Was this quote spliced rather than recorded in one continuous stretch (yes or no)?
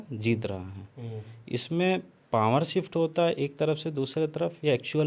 no